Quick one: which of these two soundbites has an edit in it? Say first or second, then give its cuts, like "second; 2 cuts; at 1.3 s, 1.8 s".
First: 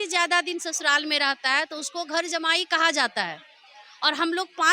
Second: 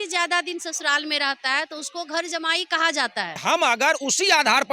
second; 1 cut; at 3.4 s